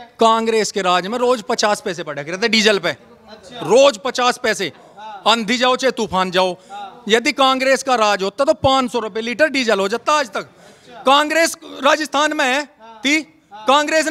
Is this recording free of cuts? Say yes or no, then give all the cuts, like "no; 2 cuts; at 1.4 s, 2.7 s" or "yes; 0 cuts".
yes; 0 cuts